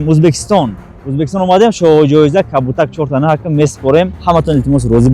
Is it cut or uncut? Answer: cut